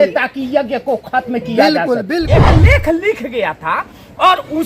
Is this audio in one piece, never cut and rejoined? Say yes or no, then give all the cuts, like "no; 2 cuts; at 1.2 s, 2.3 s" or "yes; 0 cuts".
no; 1 cut; at 2.4 s